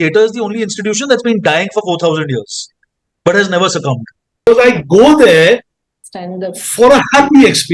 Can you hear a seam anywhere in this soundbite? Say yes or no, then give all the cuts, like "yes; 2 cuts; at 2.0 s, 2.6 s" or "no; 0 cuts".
yes; 1 cut; at 4.5 s